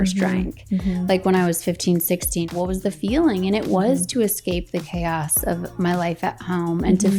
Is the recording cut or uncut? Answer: cut